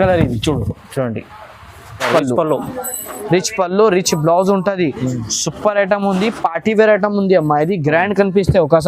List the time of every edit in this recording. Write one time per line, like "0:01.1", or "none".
0:02.1